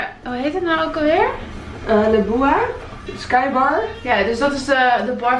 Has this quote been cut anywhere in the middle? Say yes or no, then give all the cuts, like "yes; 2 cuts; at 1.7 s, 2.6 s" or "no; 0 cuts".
no; 0 cuts